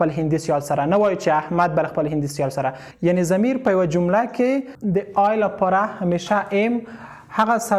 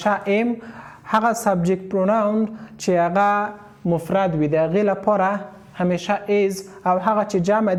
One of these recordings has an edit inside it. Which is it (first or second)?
first